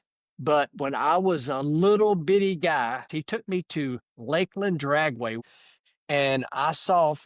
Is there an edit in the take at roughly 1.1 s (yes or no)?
no